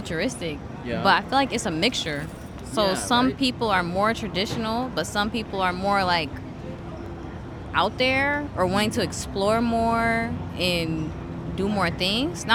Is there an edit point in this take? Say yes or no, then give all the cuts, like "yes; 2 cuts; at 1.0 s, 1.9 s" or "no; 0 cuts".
no; 0 cuts